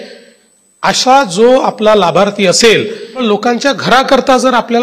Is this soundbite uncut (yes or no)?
no